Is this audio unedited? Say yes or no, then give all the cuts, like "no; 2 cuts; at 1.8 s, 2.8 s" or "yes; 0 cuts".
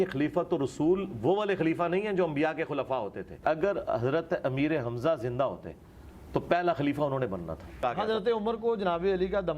no; 2 cuts; at 3.4 s, 7.8 s